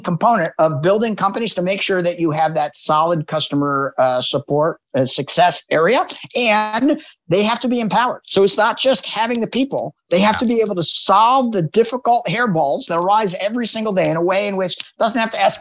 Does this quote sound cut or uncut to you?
uncut